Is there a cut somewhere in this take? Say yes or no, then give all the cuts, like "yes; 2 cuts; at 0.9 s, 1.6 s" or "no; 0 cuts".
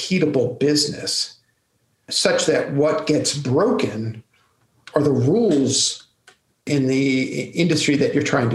yes; 2 cuts; at 2.1 s, 6.6 s